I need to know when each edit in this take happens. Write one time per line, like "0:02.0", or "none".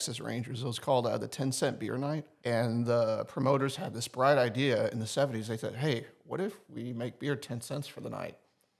0:02.3